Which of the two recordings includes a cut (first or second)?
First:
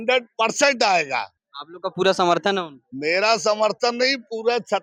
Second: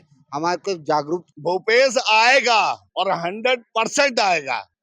second